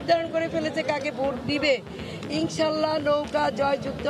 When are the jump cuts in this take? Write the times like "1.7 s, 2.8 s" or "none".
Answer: none